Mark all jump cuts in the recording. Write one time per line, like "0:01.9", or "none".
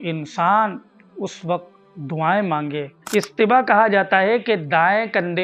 0:03.0